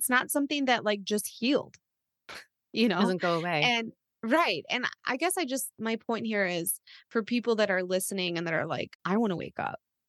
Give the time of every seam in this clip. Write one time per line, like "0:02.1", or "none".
0:09.0